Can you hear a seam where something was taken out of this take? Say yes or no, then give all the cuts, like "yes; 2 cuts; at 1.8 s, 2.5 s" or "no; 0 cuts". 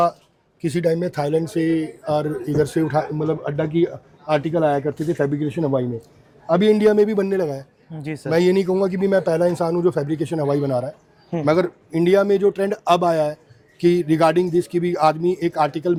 no; 0 cuts